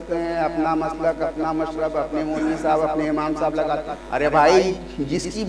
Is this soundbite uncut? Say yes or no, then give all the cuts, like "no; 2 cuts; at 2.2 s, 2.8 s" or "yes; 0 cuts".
no; 1 cut; at 4.0 s